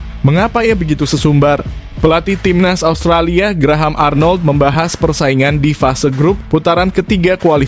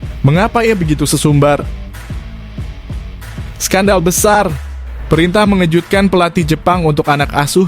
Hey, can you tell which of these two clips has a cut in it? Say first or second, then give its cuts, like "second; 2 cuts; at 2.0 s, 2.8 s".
second; 2 cuts; at 1.8 s, 3.6 s